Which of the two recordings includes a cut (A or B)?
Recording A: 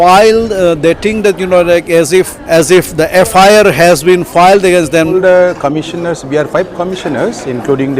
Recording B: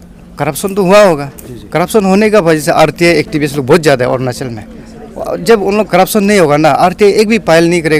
A